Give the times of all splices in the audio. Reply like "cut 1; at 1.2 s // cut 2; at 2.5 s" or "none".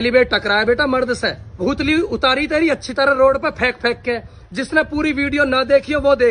cut 1; at 1.6 s